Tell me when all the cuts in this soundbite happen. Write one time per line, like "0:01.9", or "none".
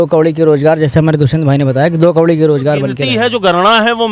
0:03.0